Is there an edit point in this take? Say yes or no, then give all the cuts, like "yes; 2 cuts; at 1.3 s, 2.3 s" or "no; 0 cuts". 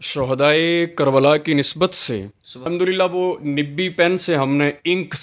yes; 1 cut; at 2.6 s